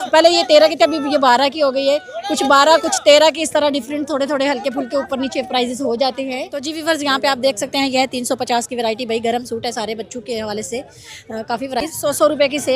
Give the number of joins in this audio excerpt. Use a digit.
2